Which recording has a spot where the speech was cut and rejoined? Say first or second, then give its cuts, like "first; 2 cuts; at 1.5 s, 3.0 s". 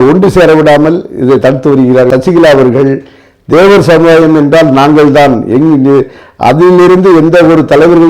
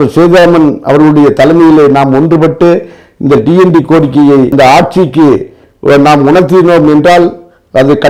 first; 1 cut; at 2.1 s